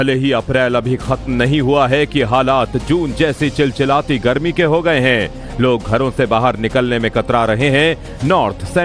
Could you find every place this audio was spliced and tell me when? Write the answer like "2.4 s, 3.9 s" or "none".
7.6 s